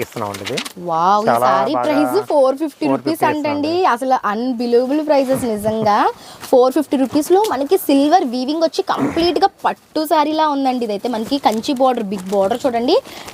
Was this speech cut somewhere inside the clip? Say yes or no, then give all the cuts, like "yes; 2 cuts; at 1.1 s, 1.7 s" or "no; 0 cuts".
no; 0 cuts